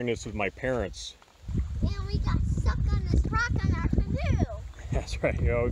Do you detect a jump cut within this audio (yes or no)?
yes